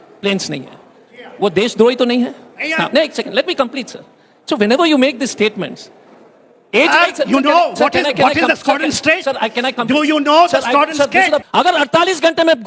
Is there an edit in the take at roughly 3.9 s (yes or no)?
no